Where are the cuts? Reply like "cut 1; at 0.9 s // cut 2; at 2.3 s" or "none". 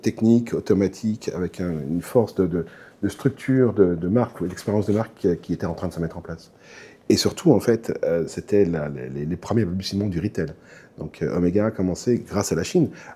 none